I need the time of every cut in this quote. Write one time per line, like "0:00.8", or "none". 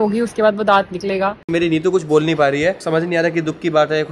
0:01.4
0:02.8